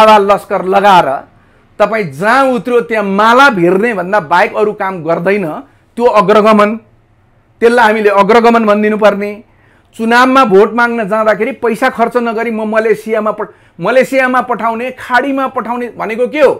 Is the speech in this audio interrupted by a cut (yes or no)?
no